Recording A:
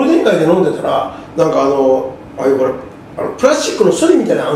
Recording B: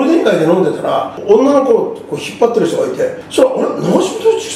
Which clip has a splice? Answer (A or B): B